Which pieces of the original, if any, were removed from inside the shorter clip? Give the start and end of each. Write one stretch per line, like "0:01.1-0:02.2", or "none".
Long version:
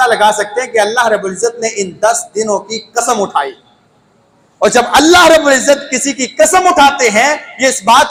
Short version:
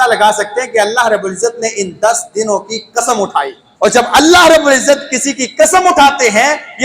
0:03.6-0:04.4

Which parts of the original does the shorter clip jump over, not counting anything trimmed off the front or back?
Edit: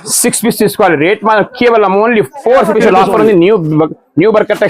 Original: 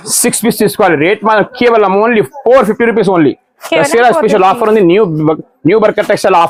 0:02.7-0:04.2

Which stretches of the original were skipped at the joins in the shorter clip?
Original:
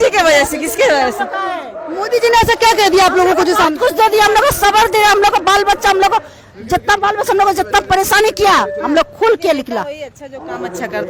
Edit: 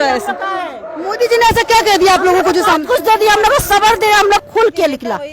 0:05.3-0:09.1

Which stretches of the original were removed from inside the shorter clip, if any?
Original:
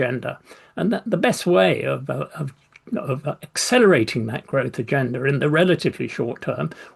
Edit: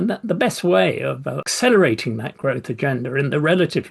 0:02.3-0:03.5

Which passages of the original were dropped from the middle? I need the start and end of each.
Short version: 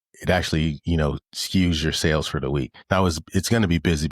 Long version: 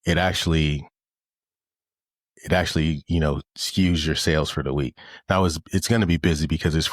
0:05.0-0:05.1

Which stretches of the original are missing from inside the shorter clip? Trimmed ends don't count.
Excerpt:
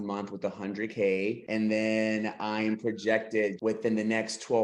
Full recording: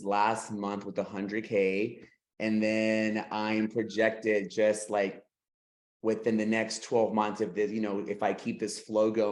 0:02.0-0:02.3
0:04.5-0:06.0

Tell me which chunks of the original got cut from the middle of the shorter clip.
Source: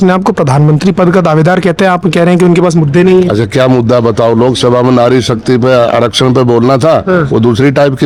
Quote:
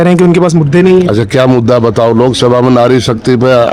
none

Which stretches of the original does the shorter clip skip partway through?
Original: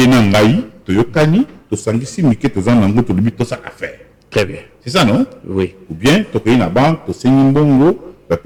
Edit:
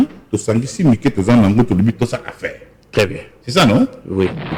none

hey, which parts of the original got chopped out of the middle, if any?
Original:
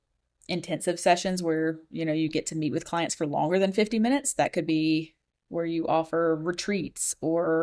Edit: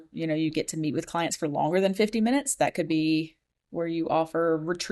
none

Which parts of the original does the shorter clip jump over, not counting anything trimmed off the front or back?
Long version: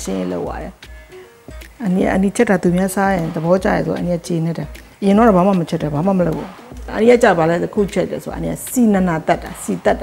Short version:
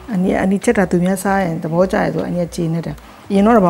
none

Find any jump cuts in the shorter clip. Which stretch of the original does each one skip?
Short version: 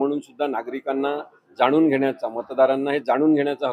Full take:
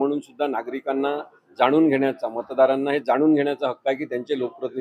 none

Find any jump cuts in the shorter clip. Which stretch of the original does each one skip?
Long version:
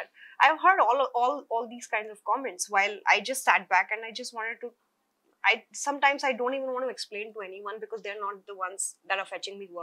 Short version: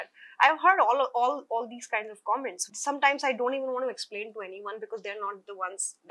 0:02.6-0:05.6

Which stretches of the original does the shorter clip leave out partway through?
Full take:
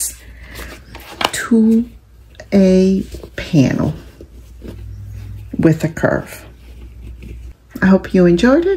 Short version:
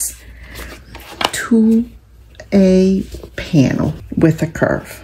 0:04.0-0:05.4

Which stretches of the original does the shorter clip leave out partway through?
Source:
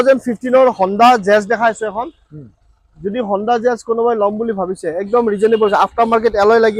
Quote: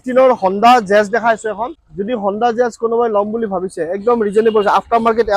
0:02.2-0:02.9

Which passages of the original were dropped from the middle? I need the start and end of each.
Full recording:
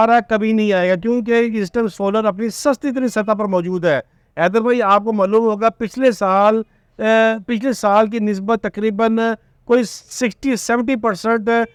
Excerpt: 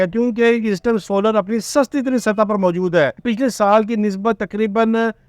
0:04.1-0:07.5

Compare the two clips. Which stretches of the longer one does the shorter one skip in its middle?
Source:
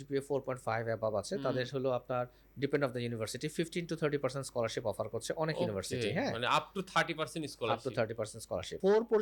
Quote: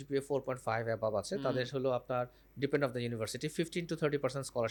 none

